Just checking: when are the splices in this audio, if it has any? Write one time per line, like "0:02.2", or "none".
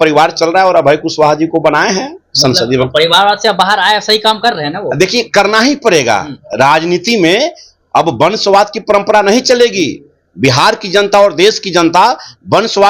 none

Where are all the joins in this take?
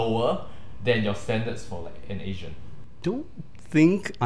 none

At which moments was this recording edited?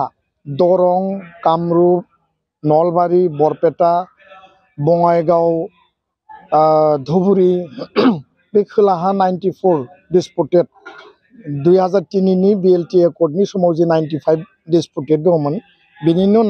none

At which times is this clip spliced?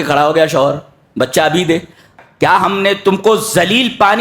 0:02.1

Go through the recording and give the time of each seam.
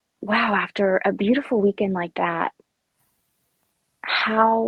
none

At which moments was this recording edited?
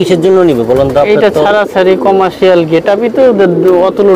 none

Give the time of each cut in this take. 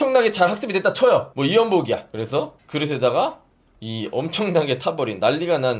0:01.3
0:02.1

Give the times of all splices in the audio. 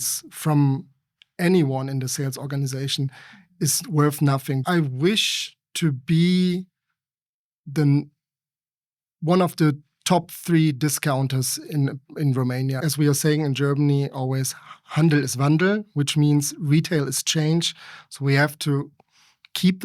0:04.6
0:12.8

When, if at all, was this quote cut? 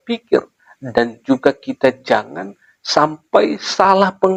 none

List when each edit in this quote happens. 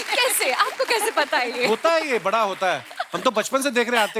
none

